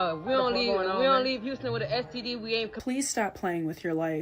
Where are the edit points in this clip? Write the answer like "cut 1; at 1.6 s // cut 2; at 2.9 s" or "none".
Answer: none